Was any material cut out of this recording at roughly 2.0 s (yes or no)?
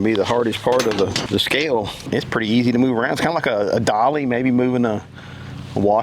yes